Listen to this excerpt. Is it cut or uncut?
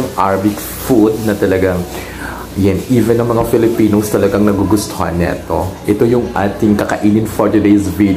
uncut